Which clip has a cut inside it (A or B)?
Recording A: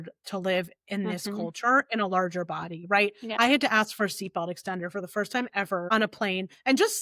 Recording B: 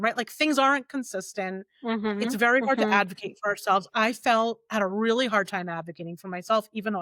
A